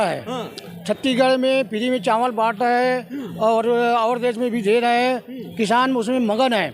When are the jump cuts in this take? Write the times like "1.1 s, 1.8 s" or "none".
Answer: none